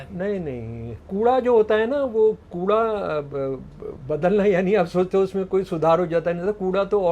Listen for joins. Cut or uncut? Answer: cut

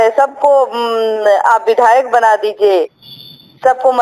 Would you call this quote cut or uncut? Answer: uncut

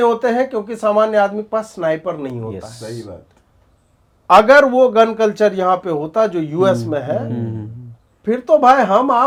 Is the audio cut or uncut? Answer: uncut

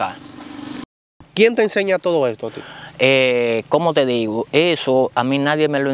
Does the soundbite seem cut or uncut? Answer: cut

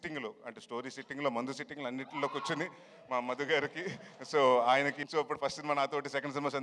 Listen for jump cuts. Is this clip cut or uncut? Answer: cut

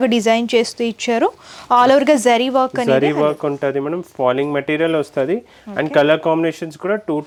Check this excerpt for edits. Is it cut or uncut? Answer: uncut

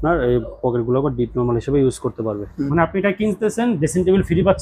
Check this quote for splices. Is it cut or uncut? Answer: cut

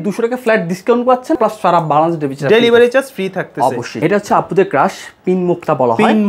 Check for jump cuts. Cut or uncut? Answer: cut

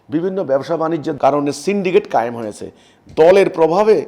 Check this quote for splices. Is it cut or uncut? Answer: cut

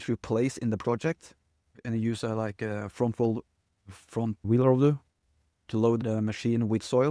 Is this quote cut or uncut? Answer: cut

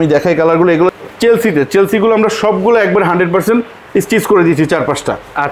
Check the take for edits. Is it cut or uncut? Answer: cut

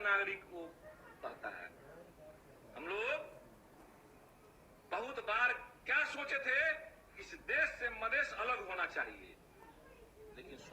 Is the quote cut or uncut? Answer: uncut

